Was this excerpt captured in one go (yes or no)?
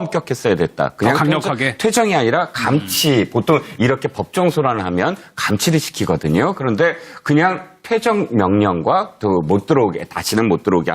no